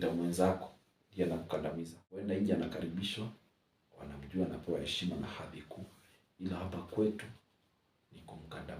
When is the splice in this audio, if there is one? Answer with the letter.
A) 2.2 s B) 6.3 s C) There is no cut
A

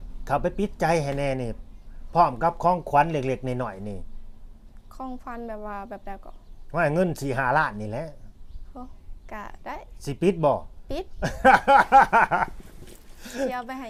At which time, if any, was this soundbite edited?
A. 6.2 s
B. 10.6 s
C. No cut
C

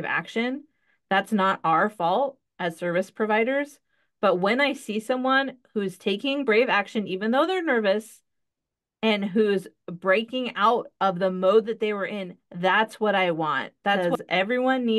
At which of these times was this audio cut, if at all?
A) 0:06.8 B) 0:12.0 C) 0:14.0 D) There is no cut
C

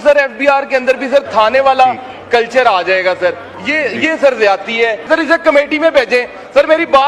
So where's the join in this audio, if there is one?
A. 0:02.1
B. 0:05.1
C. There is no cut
B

